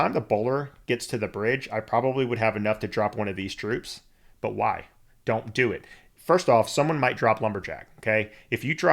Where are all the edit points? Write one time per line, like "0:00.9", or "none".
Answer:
none